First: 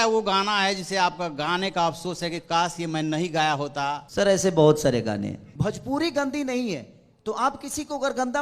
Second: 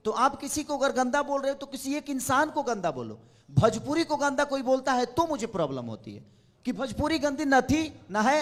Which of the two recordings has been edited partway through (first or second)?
first